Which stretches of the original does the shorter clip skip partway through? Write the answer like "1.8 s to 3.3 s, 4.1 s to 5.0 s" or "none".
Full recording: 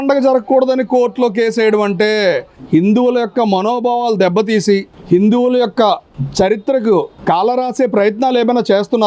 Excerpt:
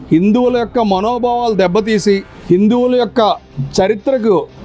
none